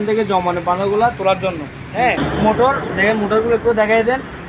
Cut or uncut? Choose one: cut